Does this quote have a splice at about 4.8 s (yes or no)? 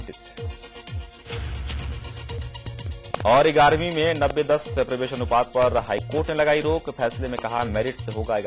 no